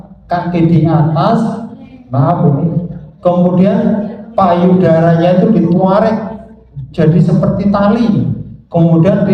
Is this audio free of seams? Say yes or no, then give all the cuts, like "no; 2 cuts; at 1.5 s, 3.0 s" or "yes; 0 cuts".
yes; 0 cuts